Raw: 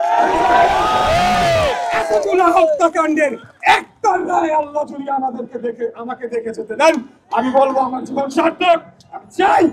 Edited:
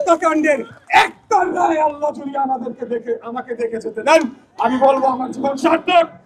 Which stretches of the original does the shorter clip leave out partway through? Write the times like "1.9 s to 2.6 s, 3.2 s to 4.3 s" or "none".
none